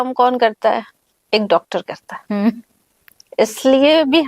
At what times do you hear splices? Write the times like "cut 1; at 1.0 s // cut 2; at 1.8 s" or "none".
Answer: none